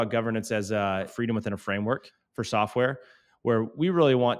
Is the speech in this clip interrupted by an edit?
yes; 2 cuts; at 1.1 s, 2.2 s

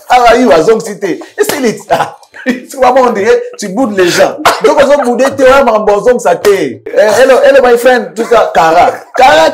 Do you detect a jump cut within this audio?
yes; 1 cut; at 6.9 s

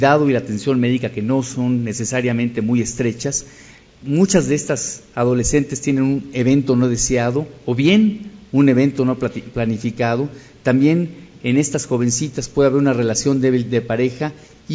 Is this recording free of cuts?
no; 1 cut; at 8.8 s

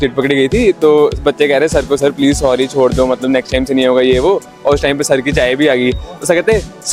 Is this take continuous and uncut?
yes; 0 cuts

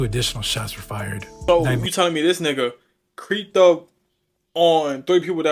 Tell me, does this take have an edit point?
yes; 1 cut; at 1.3 s

